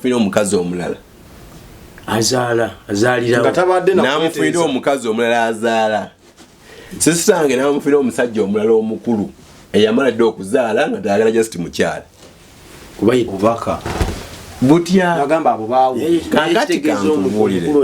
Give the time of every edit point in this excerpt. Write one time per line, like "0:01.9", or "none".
0:13.3